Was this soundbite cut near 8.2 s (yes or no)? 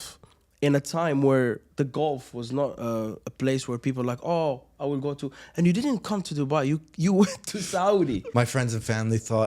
yes